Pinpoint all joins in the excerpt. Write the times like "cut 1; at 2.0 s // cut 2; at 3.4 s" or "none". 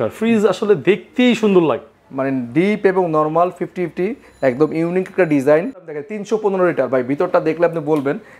cut 1; at 5.9 s